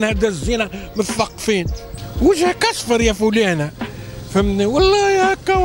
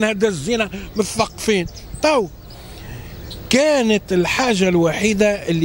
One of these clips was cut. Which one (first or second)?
first